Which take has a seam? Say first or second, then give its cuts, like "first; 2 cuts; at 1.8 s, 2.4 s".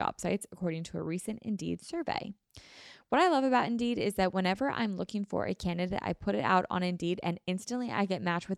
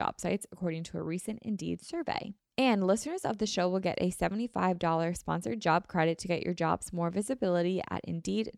second; 1 cut; at 2.4 s